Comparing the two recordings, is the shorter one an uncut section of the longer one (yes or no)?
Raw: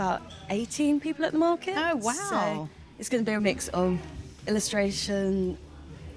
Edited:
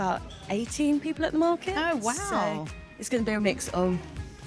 yes